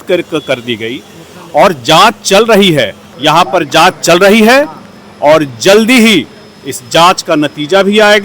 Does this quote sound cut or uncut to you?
cut